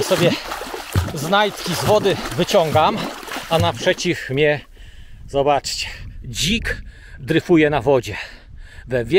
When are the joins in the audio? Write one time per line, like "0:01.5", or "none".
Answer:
none